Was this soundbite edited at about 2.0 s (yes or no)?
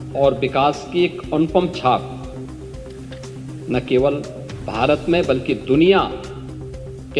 yes